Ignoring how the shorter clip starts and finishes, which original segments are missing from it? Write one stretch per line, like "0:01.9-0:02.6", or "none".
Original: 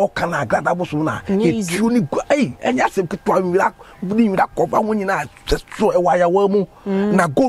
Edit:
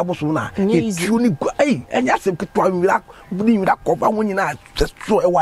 none